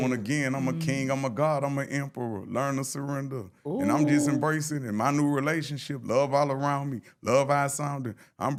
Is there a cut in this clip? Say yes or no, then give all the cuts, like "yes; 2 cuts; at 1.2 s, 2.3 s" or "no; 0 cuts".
no; 0 cuts